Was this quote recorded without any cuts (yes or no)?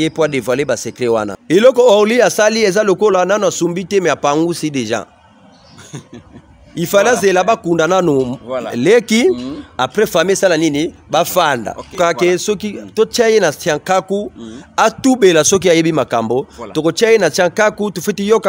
no